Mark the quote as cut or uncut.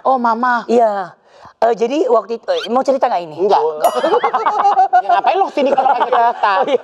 uncut